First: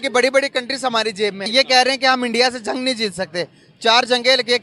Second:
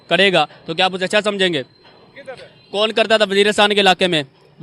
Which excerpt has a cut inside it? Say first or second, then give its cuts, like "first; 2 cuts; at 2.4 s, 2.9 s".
first; 1 cut; at 1.4 s